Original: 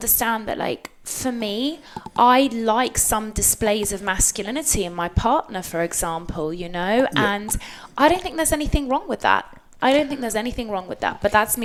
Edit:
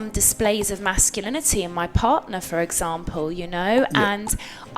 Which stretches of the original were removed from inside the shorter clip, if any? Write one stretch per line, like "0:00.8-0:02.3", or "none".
none